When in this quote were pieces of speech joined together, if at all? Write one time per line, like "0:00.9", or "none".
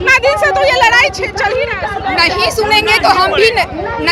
none

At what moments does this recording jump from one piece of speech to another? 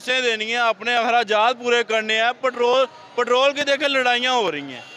none

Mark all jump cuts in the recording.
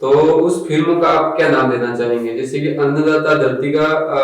none

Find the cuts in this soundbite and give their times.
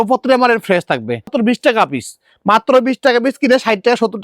0:01.3

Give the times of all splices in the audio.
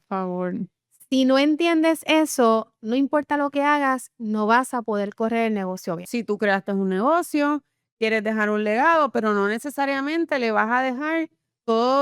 0:06.0

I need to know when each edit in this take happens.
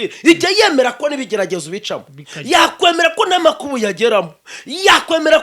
none

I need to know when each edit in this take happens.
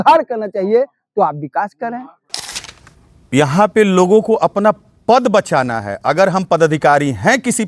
0:02.4

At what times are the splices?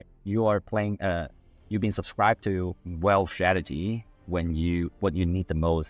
0:02.8

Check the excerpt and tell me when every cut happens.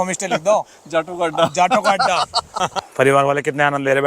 0:02.8

